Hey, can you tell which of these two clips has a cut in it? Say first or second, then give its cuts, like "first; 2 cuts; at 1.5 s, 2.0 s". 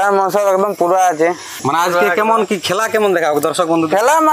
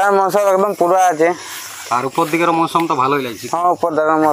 first; 1 cut; at 1.5 s